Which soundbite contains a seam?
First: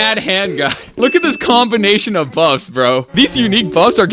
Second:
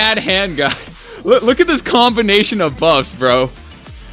first; 2 cuts; at 1.0 s, 3.1 s

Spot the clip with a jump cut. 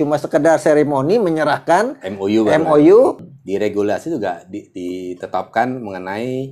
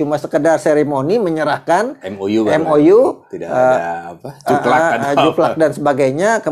first; 1 cut; at 3.3 s

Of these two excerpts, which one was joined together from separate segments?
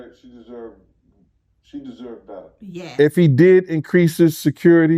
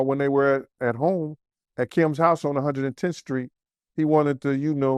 first; 1 cut; at 2.9 s

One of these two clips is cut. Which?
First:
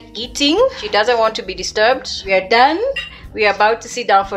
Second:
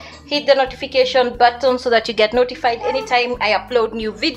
first; 2 cuts; at 0.8 s, 2.2 s

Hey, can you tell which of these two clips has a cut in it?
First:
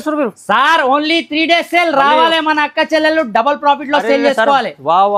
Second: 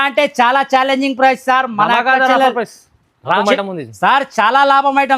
second; 1 cut; at 3.4 s

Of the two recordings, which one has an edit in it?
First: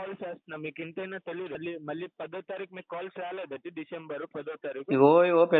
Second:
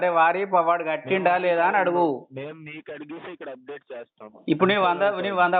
first; 1 cut; at 1.6 s

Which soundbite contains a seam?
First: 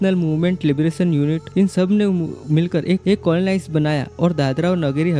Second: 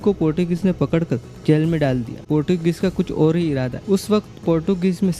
second; 1 cut; at 2.2 s

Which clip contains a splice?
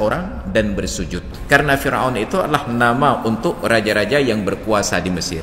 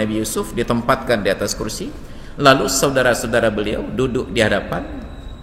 first; 1 cut; at 1.3 s

